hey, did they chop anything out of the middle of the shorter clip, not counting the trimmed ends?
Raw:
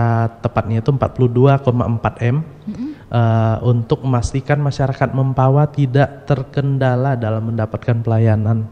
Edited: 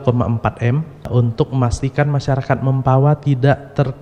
yes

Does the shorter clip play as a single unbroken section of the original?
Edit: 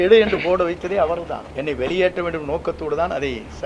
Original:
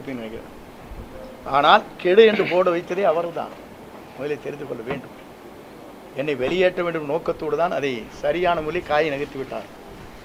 no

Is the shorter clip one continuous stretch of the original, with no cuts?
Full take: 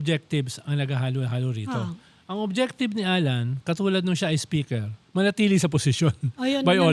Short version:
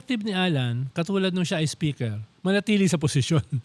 yes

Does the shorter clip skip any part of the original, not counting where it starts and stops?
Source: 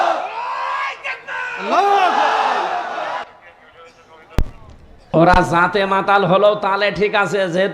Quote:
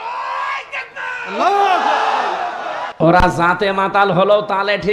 yes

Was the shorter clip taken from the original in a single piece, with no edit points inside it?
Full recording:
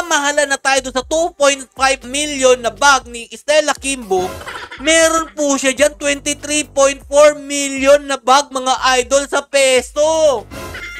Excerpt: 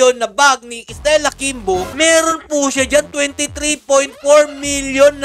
no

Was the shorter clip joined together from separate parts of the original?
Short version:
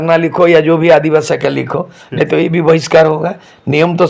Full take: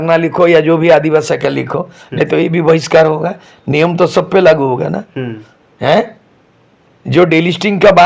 no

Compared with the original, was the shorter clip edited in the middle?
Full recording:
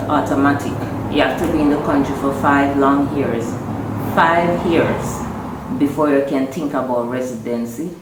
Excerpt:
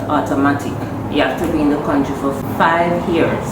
yes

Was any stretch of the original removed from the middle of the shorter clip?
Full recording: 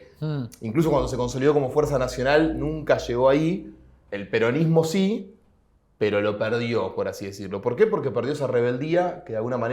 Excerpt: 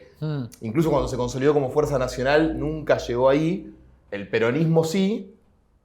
no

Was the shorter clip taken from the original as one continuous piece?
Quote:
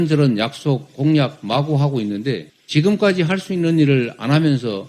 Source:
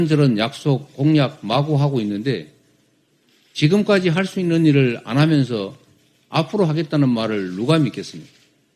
no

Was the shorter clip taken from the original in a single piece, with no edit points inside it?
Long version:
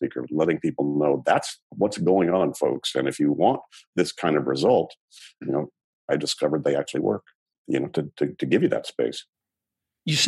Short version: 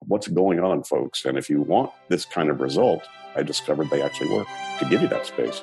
no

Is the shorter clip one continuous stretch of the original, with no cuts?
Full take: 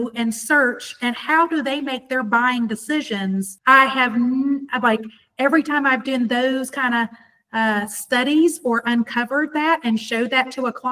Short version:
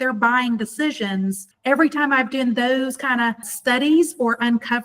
no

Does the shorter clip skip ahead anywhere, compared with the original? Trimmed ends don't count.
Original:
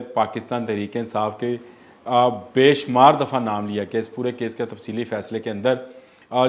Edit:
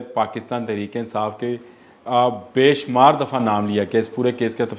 no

